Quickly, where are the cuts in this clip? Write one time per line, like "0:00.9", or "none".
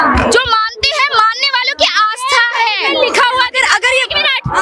none